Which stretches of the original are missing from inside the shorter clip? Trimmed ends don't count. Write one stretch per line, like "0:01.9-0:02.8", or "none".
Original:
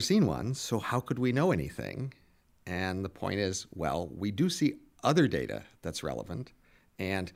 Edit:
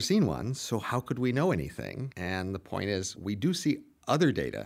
0:02.1-0:02.6
0:03.7-0:04.1